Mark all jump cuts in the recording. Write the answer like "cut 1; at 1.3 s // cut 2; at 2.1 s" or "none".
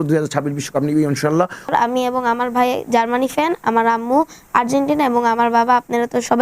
cut 1; at 1.7 s